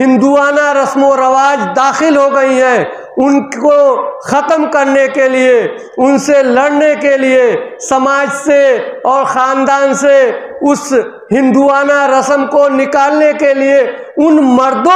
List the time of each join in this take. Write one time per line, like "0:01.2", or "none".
none